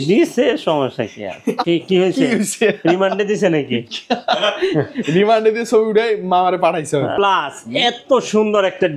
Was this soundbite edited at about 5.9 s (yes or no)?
no